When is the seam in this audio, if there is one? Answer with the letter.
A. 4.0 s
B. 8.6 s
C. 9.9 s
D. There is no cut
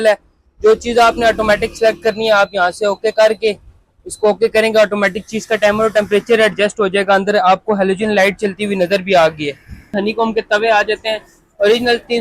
C